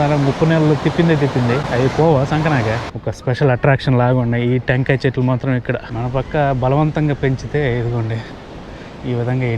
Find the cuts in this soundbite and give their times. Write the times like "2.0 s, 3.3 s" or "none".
2.9 s, 5.9 s